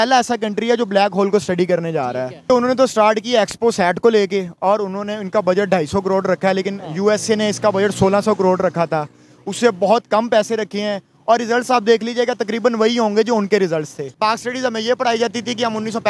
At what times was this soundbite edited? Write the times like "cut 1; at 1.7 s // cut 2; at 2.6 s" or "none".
cut 1; at 2.5 s // cut 2; at 14.1 s